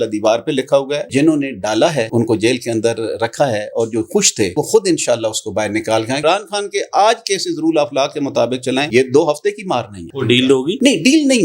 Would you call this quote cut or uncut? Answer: cut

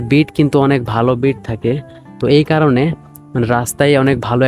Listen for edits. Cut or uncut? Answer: uncut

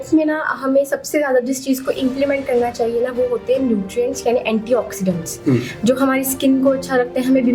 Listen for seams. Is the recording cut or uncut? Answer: uncut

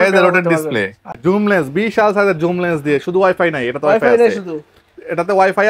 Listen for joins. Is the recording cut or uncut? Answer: cut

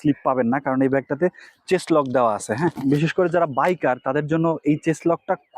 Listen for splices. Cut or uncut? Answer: cut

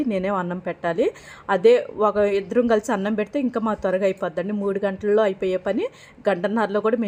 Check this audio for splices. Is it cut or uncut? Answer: uncut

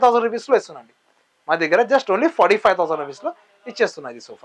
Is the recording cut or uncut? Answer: uncut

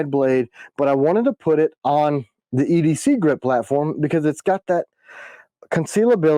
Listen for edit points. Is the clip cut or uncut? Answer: uncut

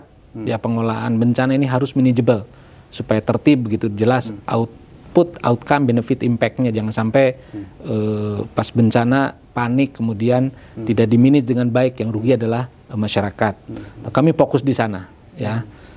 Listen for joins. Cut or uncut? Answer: uncut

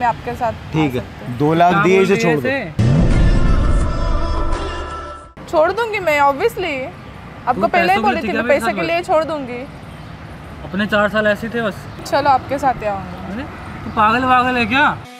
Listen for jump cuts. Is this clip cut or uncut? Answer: cut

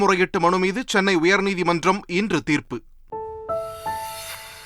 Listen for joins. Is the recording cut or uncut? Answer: cut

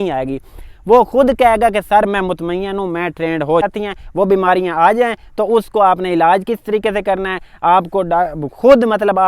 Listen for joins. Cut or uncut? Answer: cut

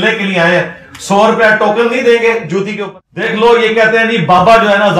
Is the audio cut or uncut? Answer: cut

